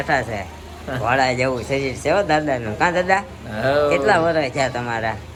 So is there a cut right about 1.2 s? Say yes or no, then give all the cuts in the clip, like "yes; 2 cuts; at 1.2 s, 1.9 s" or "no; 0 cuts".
no; 0 cuts